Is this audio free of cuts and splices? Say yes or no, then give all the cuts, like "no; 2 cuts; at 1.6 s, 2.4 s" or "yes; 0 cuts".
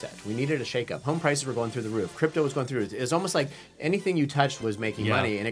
no; 2 cuts; at 1.0 s, 4.6 s